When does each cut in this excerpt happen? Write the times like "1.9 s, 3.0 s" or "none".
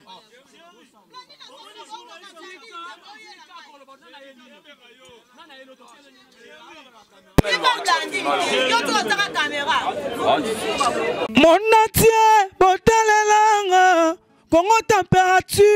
none